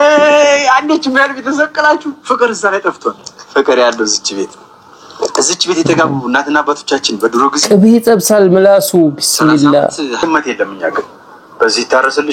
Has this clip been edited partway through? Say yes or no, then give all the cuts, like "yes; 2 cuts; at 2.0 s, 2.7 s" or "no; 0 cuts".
yes; 1 cut; at 10.2 s